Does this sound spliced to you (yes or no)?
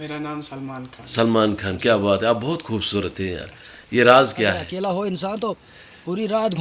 yes